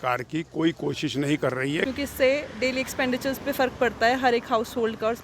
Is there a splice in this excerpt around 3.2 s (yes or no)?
no